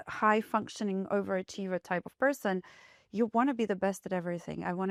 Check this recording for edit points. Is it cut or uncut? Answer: uncut